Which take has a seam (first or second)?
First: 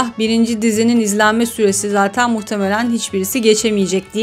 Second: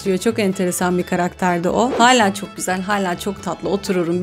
second